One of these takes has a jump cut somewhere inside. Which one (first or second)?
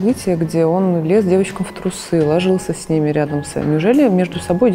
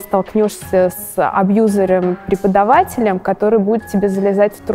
first